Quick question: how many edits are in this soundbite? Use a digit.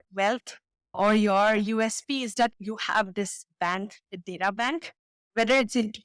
0